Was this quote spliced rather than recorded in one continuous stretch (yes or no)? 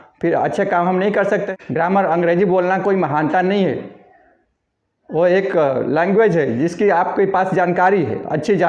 yes